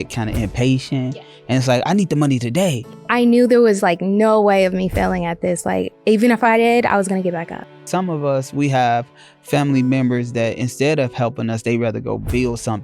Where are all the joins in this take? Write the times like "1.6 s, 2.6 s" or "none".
2.8 s, 7.9 s